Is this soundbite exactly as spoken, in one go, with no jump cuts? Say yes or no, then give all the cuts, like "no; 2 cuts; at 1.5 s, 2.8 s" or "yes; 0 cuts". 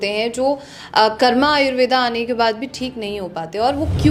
yes; 0 cuts